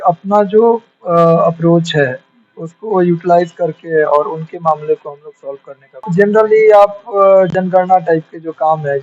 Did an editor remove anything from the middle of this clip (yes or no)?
yes